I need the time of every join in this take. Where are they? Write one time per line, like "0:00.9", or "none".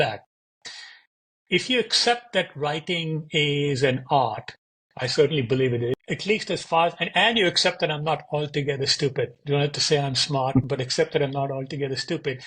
0:06.0